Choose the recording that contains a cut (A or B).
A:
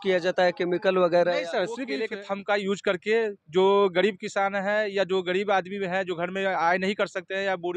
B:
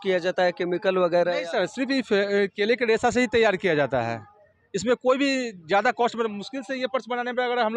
A